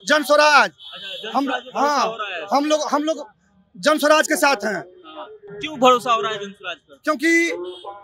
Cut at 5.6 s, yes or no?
no